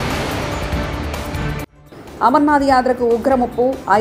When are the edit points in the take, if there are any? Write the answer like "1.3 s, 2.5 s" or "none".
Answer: 1.8 s